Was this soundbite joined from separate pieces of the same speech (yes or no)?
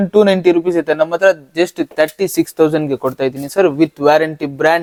no